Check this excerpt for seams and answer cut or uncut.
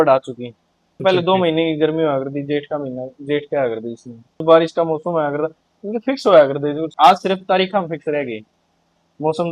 cut